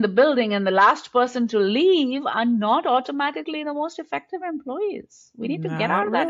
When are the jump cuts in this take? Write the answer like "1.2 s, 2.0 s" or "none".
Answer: none